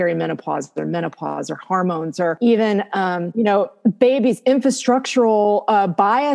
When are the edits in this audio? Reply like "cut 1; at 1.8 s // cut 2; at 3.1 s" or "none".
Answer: cut 1; at 2.4 s // cut 2; at 3.2 s